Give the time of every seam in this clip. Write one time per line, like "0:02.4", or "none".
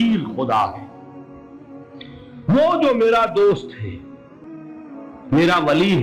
0:01.0
0:02.4
0:03.9
0:05.3